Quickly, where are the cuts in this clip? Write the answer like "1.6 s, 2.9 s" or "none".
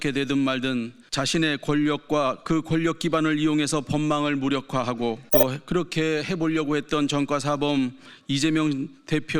1.0 s, 2.4 s, 5.2 s